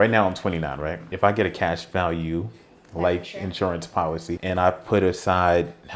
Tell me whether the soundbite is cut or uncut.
cut